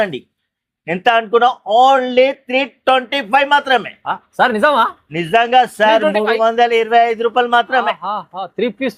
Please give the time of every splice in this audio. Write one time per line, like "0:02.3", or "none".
none